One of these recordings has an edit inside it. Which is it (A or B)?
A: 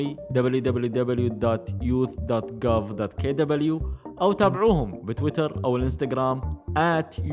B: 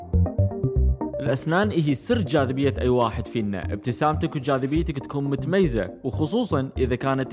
B